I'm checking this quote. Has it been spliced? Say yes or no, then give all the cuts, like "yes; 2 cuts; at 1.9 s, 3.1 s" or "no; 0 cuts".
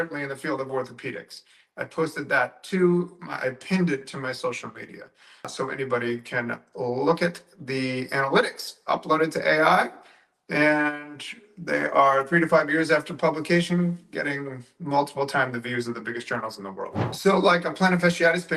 yes; 1 cut; at 17.0 s